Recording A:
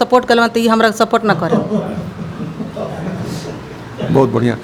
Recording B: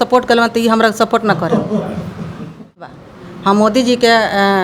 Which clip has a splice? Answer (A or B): B